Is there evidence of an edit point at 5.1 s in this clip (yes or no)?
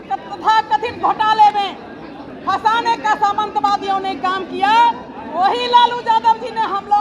no